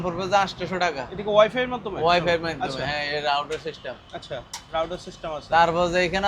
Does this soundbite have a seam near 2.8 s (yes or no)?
no